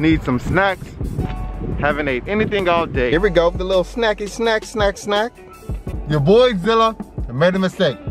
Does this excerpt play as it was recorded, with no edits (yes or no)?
no